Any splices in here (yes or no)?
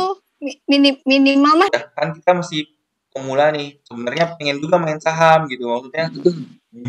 yes